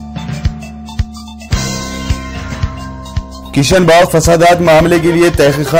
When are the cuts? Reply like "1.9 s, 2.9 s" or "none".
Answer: 3.4 s